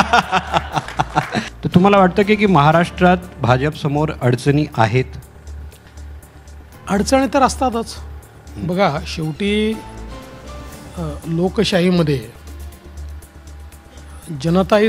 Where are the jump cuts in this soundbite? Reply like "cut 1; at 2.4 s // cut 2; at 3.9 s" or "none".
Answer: cut 1; at 1.5 s